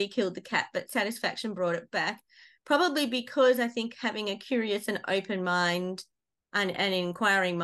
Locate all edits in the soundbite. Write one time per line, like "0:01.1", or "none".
none